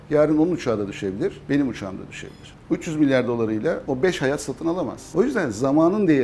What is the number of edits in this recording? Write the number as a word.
one